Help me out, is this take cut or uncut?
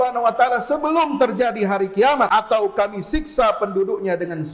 cut